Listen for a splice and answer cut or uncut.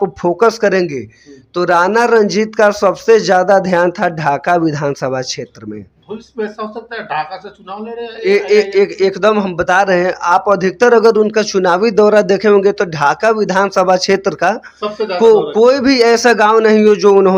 uncut